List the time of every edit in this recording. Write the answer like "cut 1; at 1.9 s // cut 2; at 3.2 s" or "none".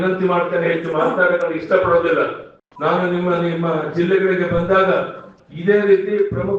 none